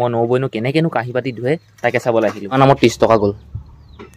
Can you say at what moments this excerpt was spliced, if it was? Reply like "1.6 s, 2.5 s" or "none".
2.6 s